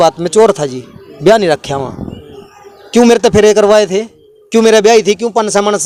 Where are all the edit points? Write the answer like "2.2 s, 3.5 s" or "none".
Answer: none